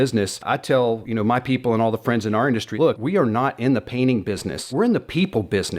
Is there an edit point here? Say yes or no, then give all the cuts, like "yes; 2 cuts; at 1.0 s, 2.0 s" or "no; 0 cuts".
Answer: yes; 3 cuts; at 0.8 s, 2.8 s, 4.6 s